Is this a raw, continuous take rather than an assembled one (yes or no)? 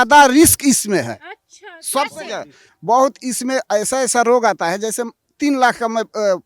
yes